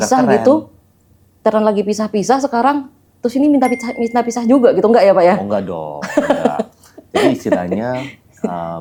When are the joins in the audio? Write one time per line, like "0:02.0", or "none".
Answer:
none